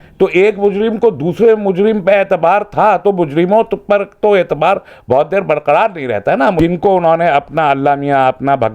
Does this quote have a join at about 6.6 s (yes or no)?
yes